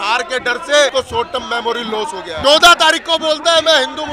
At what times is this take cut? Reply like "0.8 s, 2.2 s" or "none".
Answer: 0.9 s, 2.4 s